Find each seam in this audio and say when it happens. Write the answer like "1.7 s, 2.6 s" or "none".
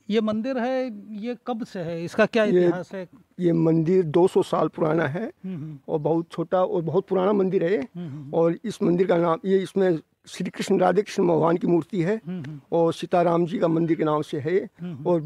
none